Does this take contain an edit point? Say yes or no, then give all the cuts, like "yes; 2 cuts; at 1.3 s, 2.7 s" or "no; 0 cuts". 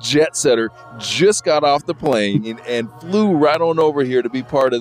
no; 0 cuts